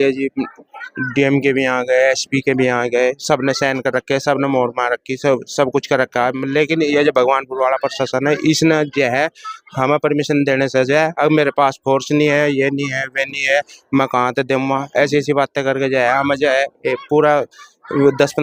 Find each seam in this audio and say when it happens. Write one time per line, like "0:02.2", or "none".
none